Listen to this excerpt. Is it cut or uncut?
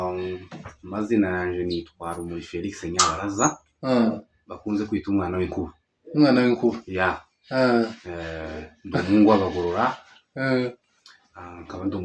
uncut